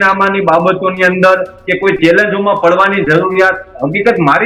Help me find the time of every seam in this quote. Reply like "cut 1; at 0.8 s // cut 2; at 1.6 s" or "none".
none